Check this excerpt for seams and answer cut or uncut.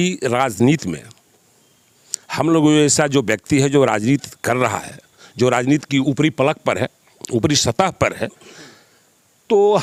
uncut